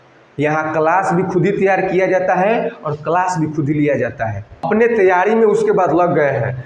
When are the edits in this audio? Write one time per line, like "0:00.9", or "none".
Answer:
0:04.7